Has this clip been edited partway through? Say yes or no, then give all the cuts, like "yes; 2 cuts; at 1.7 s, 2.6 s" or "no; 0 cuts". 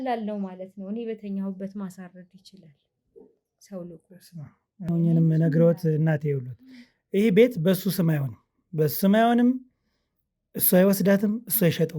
yes; 1 cut; at 4.9 s